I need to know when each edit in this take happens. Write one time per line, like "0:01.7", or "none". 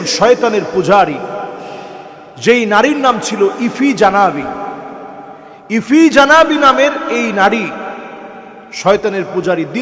none